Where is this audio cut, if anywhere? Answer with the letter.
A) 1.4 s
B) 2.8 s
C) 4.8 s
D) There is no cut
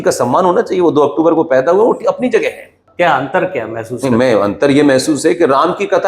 B